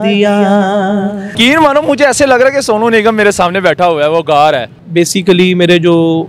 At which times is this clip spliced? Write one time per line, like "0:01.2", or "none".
0:01.3
0:04.8

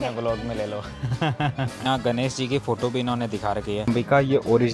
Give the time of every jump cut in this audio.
0:01.8
0:03.9

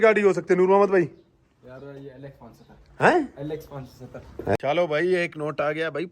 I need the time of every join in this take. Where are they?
0:04.5

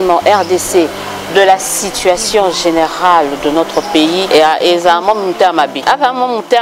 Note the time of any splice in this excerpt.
0:04.3
0:05.8

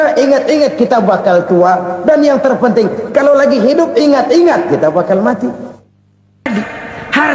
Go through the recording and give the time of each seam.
0:06.4

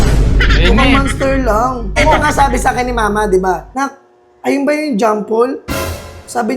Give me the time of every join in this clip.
0:01.9
0:03.7

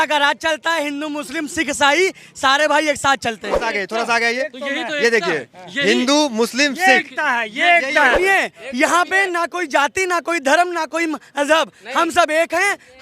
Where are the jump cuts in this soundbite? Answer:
0:03.6
0:08.2

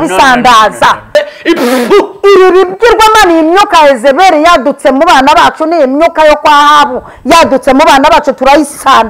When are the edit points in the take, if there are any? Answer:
0:01.1

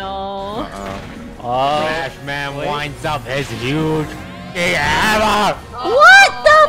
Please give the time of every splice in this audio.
none

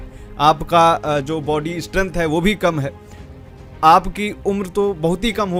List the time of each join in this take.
none

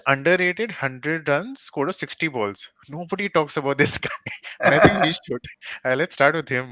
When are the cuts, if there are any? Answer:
none

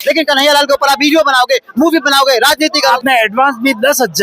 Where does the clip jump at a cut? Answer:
0:02.9

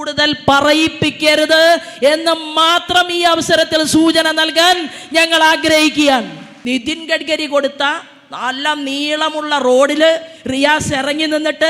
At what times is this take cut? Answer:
0:06.5

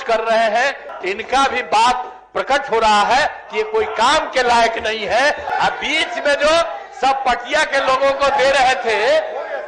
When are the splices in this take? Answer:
0:00.9
0:05.5

